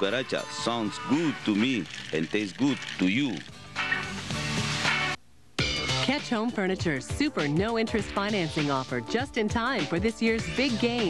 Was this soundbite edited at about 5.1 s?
yes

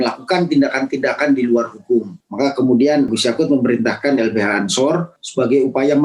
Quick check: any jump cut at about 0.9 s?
no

